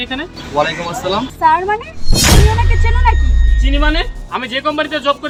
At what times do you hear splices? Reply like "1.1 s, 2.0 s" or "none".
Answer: none